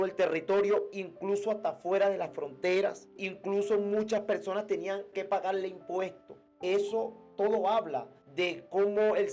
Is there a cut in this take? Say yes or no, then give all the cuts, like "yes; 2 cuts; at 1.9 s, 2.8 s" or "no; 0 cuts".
no; 0 cuts